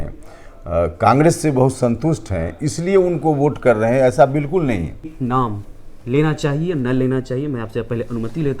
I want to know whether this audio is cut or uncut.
cut